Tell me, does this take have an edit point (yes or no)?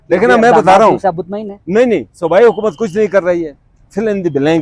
no